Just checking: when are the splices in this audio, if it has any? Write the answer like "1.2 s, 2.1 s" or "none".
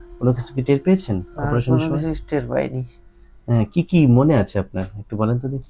none